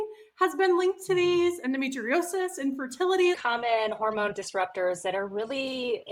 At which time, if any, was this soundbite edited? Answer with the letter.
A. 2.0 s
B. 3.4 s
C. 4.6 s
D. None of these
B